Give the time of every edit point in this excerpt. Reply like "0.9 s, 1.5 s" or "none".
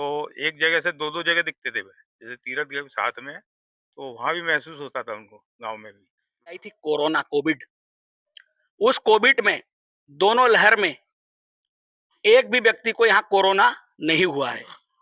6.6 s